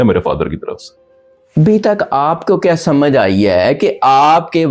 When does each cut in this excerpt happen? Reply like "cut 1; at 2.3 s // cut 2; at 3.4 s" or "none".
none